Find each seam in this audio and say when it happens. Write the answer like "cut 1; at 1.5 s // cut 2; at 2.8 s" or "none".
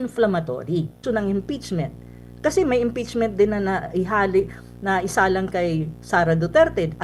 cut 1; at 1.0 s

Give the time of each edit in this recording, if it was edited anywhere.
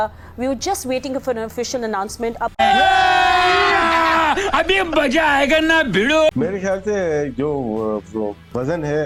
none

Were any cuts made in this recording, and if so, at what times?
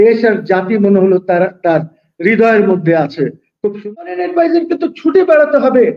cut 1; at 3.5 s

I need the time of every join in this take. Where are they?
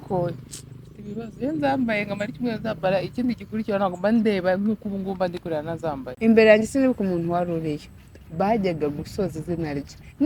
cut 1; at 6.1 s

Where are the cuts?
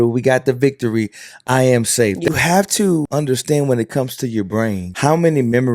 cut 1; at 2.3 s // cut 2; at 3.1 s // cut 3; at 4.9 s

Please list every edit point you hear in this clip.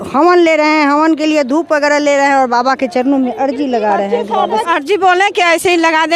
cut 1; at 4.6 s

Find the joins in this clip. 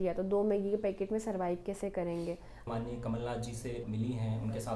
cut 1; at 2.6 s

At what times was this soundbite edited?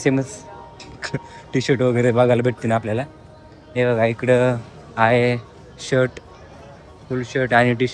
none

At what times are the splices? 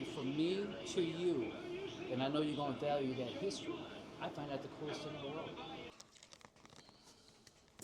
cut 1; at 5.9 s

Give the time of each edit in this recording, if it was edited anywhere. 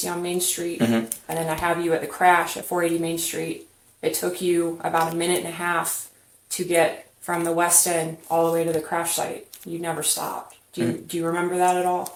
none

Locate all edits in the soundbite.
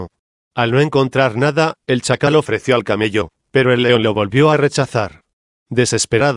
none

